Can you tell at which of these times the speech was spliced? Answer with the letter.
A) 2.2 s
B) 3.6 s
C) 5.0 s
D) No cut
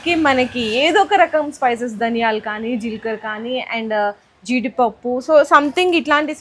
D